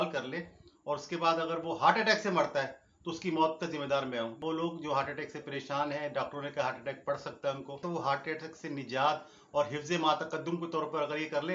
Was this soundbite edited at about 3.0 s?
no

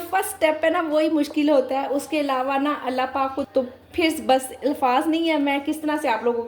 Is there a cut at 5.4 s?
no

